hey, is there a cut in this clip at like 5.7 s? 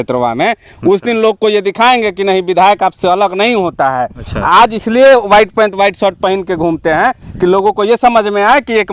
no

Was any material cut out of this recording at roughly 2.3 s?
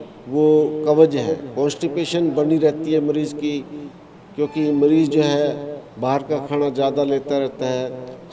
no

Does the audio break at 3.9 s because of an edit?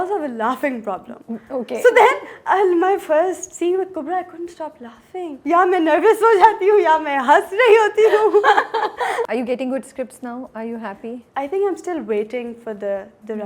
no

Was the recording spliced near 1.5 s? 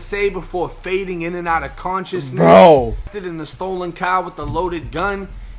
no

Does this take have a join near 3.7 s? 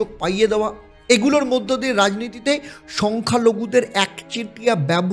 no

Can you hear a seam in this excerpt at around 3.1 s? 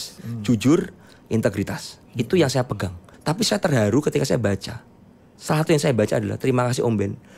yes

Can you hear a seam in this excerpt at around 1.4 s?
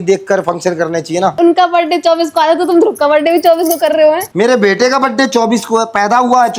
yes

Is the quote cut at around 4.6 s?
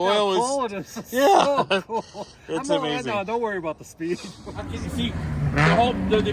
yes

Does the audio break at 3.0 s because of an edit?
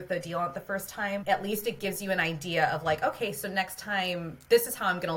no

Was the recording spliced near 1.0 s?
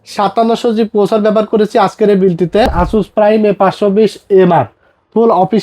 no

